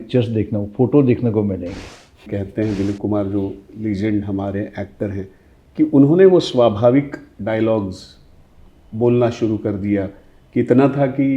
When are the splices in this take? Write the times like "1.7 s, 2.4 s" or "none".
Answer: 2.3 s